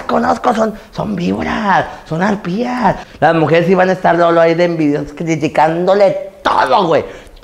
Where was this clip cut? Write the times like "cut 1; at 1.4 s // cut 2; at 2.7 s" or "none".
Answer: cut 1; at 3.1 s